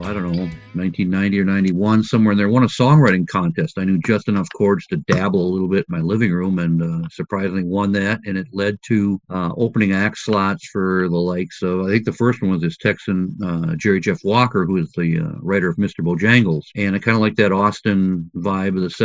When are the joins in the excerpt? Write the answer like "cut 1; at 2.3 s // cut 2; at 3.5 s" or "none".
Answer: none